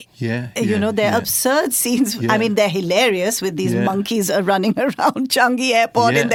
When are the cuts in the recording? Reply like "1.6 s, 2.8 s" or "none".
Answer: none